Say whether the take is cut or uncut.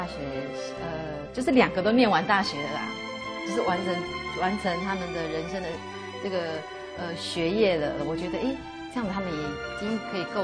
cut